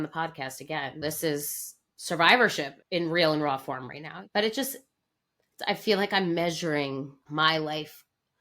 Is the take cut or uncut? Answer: cut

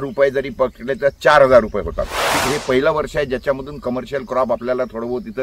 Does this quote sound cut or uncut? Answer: cut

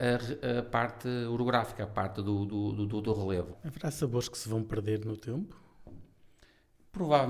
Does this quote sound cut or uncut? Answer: cut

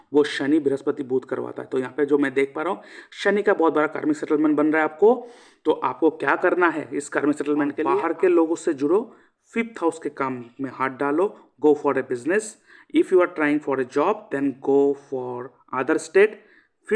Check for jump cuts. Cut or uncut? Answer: cut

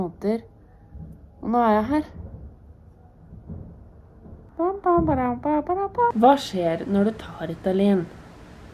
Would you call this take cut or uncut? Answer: cut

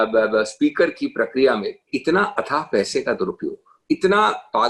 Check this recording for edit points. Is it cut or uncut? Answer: cut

